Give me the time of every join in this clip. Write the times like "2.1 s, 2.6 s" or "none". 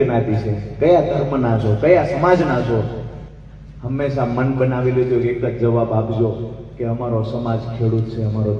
none